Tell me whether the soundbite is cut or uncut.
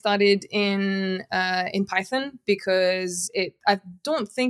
uncut